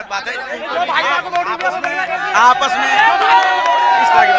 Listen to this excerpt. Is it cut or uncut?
uncut